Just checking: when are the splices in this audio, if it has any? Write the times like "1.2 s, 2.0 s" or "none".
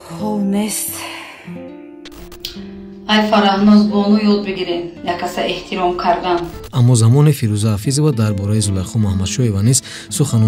2.2 s, 6.6 s